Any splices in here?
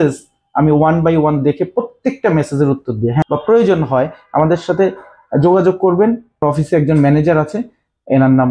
yes; 2 cuts; at 3.2 s, 6.4 s

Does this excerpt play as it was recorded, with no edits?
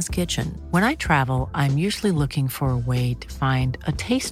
yes; 0 cuts

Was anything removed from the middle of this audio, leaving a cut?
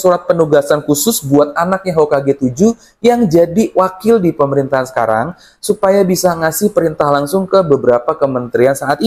no; 0 cuts

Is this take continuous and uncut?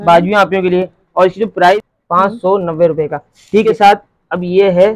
no; 2 cuts; at 1.9 s, 3.6 s

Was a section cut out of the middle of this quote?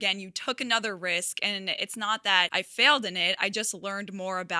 yes; 1 cut; at 2.5 s

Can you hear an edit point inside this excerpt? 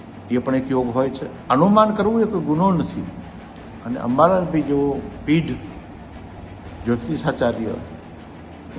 yes; 1 cut; at 1.3 s

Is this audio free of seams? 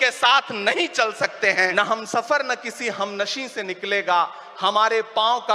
no; 1 cut; at 1.7 s

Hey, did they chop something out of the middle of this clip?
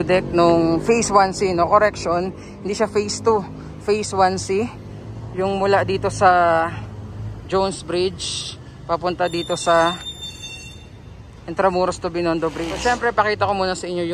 yes; 1 cut; at 12.7 s

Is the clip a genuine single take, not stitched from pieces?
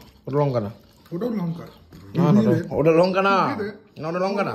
yes; 0 cuts

